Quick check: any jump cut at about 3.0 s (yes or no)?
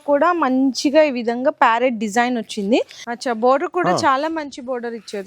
yes